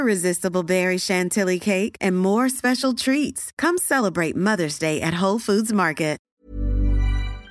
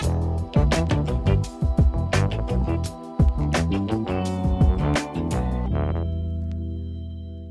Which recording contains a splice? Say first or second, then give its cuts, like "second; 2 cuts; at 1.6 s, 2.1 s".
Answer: first; 1 cut; at 6.2 s